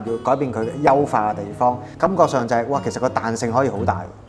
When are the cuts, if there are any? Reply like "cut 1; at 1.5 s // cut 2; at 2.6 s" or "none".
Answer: cut 1; at 1.9 s